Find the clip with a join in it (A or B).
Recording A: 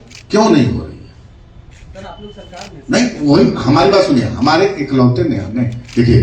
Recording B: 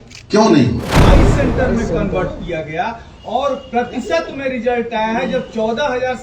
B